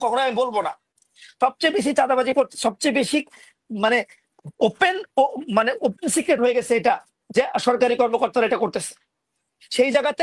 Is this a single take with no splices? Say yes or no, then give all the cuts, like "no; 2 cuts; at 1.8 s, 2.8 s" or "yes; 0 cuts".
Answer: yes; 0 cuts